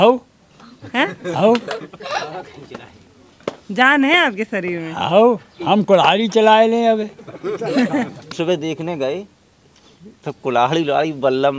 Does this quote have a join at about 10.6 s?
no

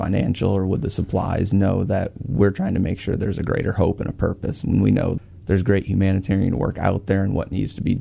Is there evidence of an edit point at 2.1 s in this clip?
no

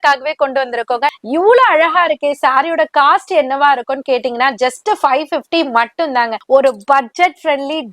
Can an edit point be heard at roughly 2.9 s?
no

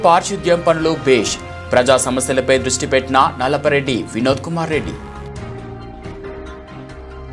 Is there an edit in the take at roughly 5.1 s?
no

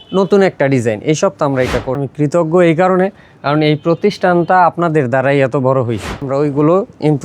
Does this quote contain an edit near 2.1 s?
yes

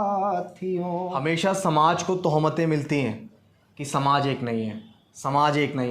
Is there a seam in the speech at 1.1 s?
yes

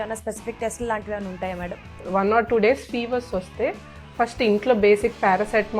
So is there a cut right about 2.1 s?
yes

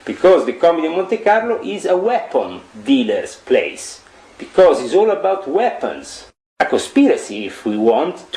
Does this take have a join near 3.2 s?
no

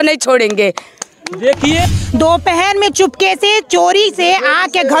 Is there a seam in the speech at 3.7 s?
no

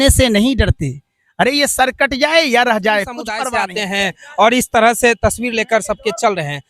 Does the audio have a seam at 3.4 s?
yes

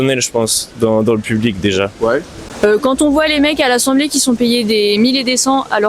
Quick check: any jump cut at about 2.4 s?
yes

